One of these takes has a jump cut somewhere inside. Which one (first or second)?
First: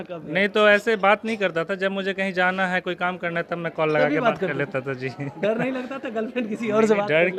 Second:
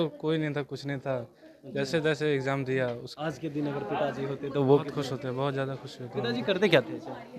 second